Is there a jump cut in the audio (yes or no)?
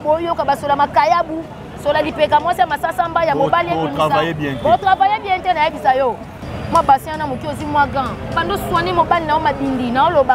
yes